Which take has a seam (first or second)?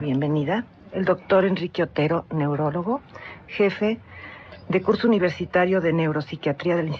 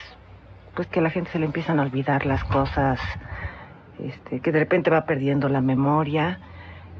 first